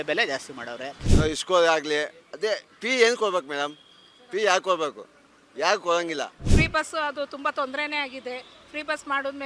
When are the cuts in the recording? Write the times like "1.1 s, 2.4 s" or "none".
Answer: 1.0 s, 6.4 s